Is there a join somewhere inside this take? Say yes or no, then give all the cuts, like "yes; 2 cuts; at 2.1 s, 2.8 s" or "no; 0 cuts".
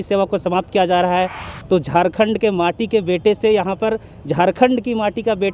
yes; 1 cut; at 1.5 s